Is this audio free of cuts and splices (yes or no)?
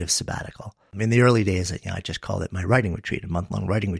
no